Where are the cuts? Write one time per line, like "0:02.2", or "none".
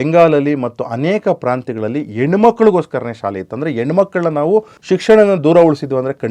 0:04.8

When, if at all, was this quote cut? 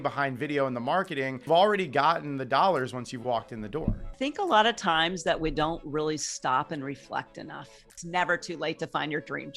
0:01.4
0:04.1
0:08.0

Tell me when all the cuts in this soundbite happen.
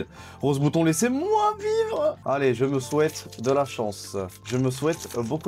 0:02.2
0:04.4

